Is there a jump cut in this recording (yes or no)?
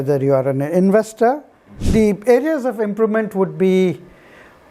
yes